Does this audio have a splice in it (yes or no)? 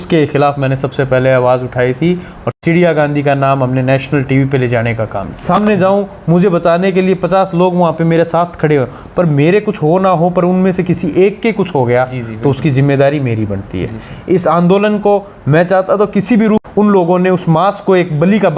yes